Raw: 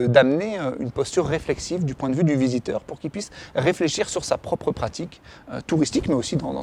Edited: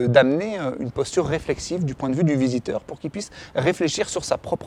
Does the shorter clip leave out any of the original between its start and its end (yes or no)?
no